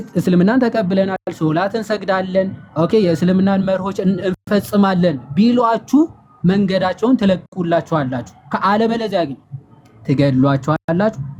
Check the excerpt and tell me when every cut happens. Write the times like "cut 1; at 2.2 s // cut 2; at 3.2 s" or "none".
none